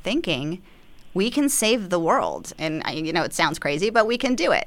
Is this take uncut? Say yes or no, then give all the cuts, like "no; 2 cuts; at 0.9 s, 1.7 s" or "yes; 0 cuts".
yes; 0 cuts